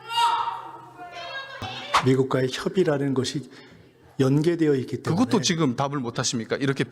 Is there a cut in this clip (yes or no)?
yes